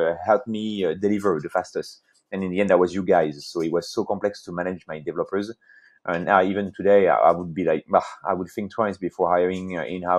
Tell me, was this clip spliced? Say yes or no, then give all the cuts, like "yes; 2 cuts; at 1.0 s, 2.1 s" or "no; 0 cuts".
no; 0 cuts